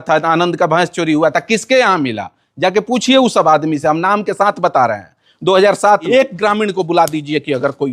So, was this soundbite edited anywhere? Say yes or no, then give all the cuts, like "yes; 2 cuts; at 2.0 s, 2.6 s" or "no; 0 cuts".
yes; 1 cut; at 6.1 s